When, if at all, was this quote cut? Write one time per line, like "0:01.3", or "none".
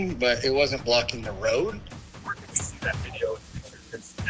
0:01.9